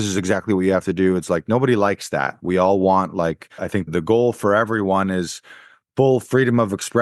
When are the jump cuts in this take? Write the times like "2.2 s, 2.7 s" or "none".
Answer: 3.9 s